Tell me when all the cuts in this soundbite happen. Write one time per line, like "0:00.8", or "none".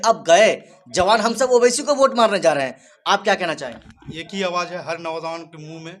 0:04.1